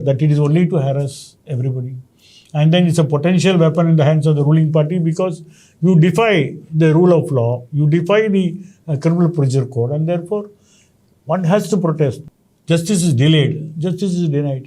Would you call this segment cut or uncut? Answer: cut